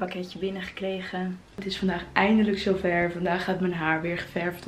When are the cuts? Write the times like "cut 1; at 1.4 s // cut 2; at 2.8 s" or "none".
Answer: cut 1; at 1.6 s